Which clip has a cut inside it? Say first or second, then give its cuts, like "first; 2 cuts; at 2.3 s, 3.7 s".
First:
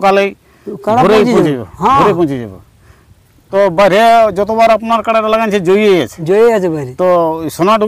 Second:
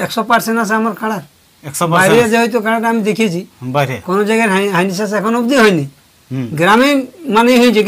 first; 1 cut; at 3.5 s